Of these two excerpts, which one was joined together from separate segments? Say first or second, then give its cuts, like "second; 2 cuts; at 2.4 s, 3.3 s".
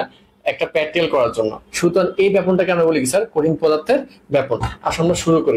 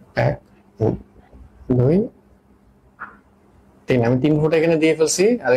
first; 1 cut; at 1.6 s